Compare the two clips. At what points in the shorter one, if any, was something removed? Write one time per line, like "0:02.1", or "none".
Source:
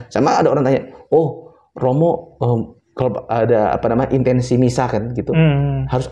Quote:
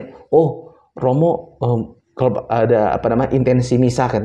none